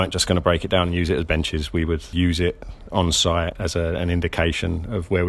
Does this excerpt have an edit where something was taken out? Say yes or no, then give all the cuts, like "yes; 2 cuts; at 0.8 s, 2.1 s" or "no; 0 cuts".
yes; 2 cuts; at 2.1 s, 3.5 s